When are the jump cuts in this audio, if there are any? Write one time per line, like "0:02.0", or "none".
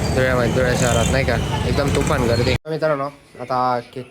0:02.6